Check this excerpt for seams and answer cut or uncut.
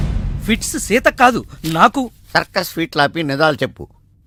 uncut